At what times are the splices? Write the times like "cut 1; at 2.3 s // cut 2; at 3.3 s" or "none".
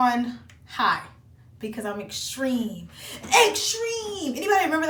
none